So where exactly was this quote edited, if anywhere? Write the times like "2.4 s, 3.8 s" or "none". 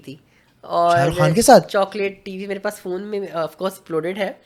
none

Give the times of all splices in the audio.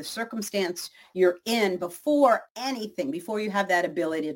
2.5 s

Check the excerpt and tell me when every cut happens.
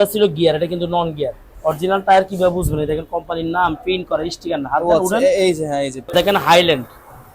1.4 s, 6.0 s

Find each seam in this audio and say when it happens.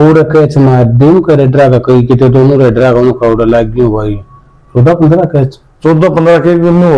none

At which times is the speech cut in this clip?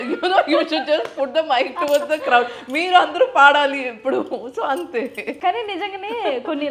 5.2 s

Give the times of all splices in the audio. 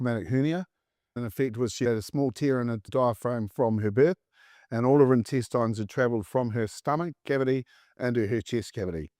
1.2 s

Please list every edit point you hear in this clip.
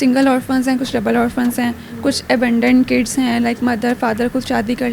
none

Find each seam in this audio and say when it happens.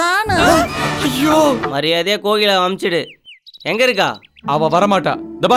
1.7 s

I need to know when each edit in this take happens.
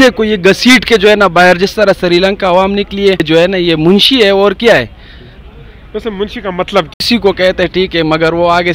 3.2 s, 6.9 s

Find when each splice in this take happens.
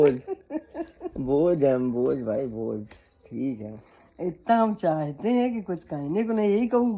none

